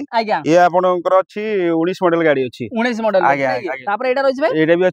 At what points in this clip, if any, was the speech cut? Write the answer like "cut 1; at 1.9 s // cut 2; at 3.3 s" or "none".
none